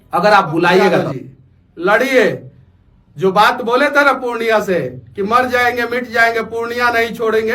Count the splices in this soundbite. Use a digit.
1